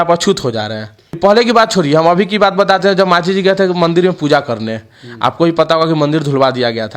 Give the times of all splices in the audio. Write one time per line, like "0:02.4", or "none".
0:01.2